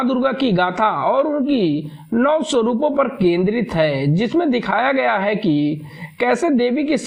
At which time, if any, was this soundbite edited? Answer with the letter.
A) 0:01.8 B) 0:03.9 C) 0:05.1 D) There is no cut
D